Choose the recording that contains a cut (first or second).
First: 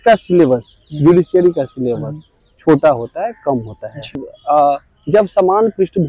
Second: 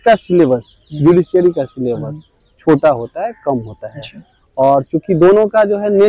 first